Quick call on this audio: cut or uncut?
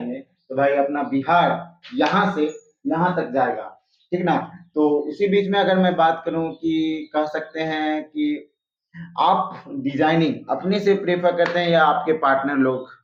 uncut